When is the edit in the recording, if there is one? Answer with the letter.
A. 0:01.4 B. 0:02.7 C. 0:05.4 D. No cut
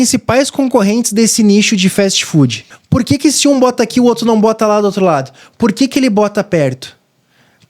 B